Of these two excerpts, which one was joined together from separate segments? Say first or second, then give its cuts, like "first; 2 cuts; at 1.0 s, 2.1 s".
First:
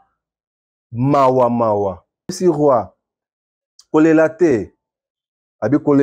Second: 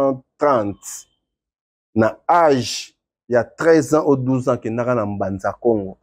first; 1 cut; at 2.4 s